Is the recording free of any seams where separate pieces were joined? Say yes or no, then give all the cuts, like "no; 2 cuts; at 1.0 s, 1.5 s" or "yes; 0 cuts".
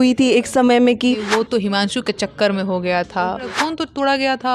no; 2 cuts; at 1.3 s, 3.6 s